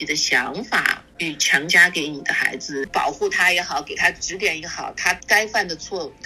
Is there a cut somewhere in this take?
yes; 1 cut; at 2.9 s

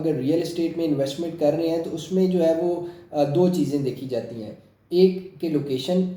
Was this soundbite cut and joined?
no; 0 cuts

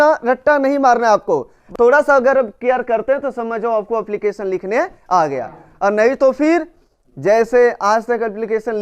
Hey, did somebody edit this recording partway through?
yes; 1 cut; at 1.7 s

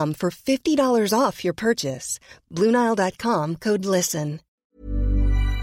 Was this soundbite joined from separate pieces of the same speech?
yes; 1 cut; at 4.7 s

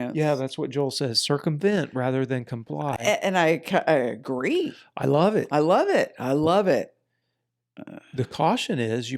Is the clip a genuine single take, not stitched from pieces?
yes; 0 cuts

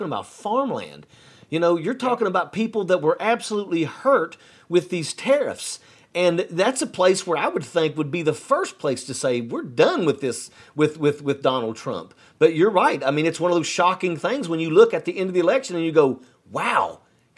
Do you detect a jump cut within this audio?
no; 0 cuts

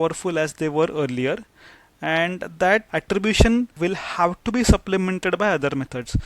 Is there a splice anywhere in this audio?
yes; 2 cuts; at 2.9 s, 3.7 s

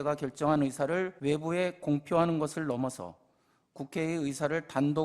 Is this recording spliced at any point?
yes; 1 cut; at 1.1 s

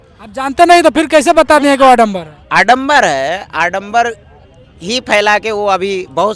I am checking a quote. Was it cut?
no; 0 cuts

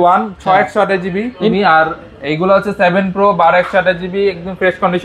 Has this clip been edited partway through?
yes; 1 cut; at 1.5 s

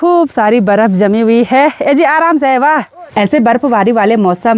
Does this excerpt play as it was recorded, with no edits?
no; 1 cut; at 3.0 s

